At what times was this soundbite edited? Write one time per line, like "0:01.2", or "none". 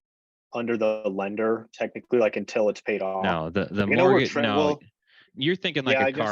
0:05.3